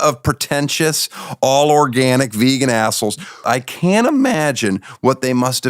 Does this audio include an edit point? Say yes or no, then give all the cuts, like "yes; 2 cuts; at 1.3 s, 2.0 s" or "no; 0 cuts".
yes; 1 cut; at 3.4 s